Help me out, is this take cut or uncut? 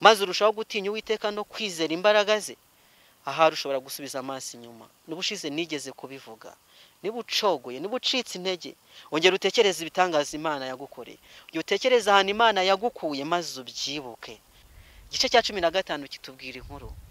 cut